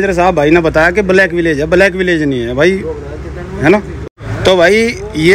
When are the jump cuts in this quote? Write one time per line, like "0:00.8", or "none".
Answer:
0:04.0